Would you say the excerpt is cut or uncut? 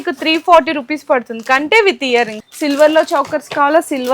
cut